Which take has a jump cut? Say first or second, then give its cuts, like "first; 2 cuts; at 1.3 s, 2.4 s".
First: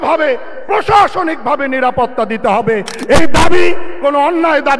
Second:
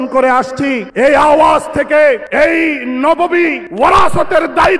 second; 3 cuts; at 0.9 s, 2.3 s, 3.6 s